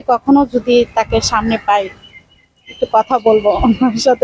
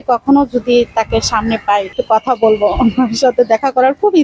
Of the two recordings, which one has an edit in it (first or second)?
second